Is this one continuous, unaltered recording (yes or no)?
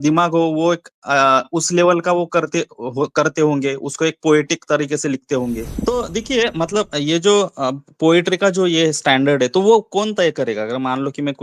no